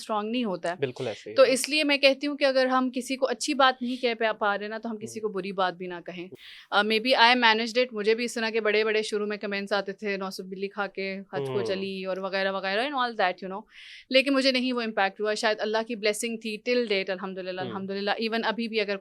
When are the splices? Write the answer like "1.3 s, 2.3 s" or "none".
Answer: none